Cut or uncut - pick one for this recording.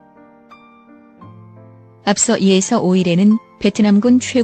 cut